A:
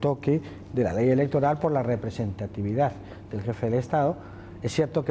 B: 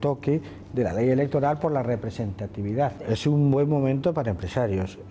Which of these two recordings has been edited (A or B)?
B